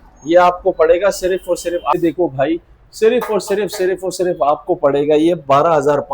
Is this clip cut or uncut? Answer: cut